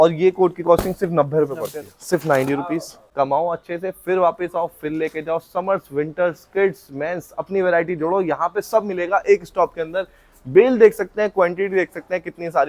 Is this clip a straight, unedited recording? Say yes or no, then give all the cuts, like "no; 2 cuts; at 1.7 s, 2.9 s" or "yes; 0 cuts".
no; 1 cut; at 3.0 s